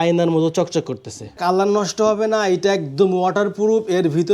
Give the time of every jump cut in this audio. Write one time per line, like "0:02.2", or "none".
0:01.4